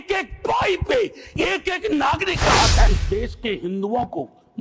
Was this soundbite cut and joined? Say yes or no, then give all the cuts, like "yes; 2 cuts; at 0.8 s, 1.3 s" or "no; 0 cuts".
yes; 1 cut; at 2.9 s